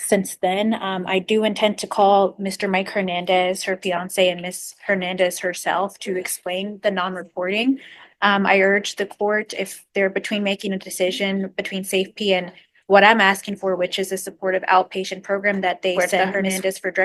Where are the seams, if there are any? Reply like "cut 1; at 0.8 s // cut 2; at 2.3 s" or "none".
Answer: cut 1; at 16.1 s